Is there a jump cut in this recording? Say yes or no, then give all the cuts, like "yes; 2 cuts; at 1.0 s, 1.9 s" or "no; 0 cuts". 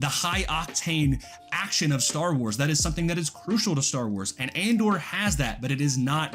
no; 0 cuts